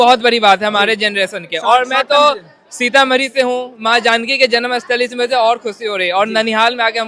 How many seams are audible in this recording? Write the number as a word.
zero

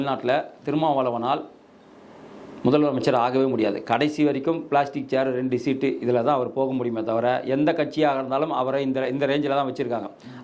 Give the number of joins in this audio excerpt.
zero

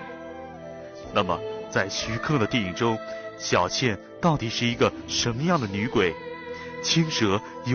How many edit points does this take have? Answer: zero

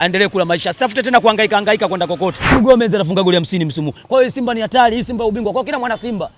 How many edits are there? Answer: one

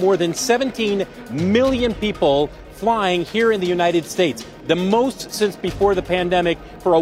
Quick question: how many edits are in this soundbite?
zero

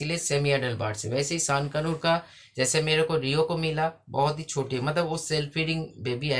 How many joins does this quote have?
zero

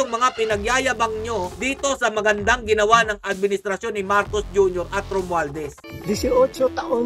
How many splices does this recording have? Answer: one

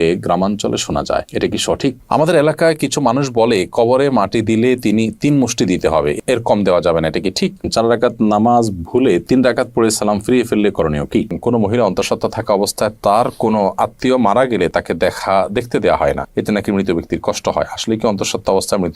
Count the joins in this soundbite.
three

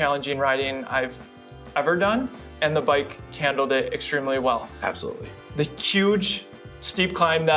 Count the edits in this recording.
zero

